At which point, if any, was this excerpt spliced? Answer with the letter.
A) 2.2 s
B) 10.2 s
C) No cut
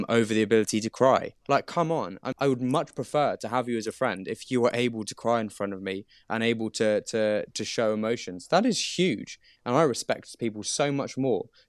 A